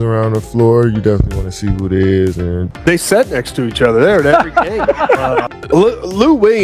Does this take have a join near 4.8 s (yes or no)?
no